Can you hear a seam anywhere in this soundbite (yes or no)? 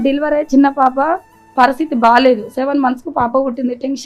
no